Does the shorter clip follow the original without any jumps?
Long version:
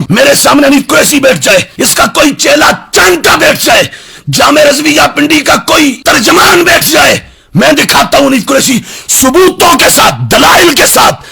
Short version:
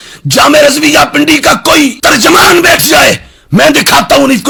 yes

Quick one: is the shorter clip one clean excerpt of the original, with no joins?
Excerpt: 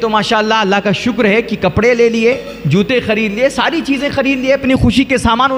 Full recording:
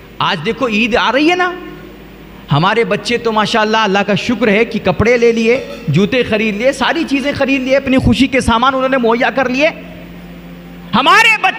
yes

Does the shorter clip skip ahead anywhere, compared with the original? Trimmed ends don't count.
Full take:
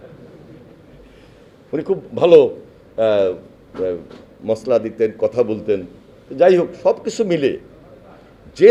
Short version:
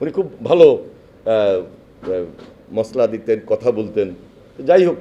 no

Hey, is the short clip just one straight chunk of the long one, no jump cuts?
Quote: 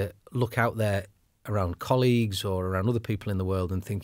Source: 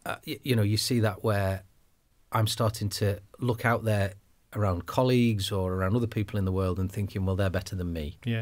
yes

